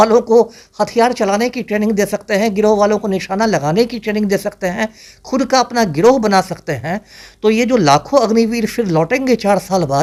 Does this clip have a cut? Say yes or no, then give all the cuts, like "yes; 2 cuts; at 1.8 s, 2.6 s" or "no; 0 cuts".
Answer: no; 0 cuts